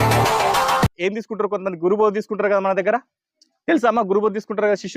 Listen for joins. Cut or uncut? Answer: cut